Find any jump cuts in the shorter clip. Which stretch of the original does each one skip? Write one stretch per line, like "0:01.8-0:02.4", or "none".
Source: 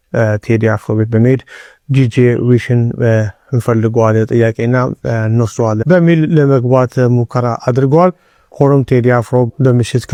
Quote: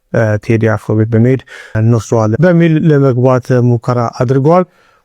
0:01.7-0:05.2